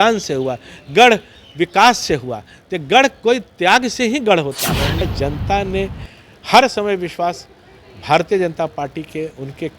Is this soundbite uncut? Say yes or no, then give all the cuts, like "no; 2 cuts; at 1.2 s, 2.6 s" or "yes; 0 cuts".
no; 1 cut; at 5.0 s